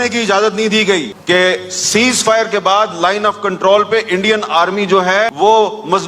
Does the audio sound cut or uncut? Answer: uncut